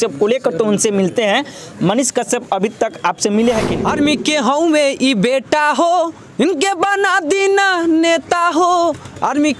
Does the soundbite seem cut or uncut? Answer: cut